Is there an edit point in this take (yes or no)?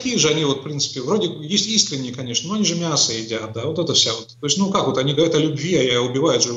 no